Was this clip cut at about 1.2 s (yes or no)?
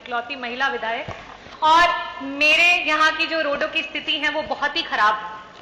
no